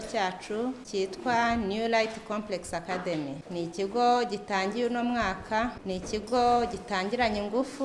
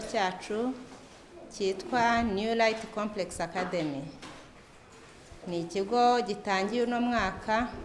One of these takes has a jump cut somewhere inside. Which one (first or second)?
first